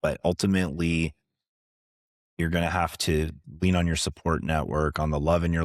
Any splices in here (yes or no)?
no